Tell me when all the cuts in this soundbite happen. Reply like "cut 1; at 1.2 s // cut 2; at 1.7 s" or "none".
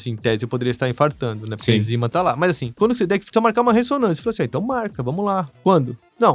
cut 1; at 2.7 s